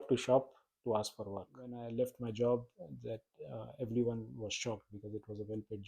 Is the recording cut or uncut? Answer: cut